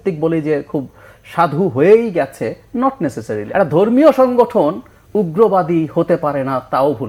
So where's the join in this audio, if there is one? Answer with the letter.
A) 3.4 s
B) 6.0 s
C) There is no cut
A